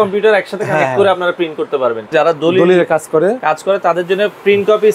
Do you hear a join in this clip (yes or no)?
yes